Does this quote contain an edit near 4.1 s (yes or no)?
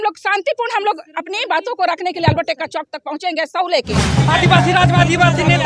yes